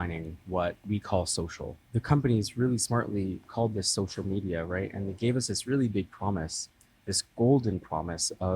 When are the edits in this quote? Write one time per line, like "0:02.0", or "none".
0:01.7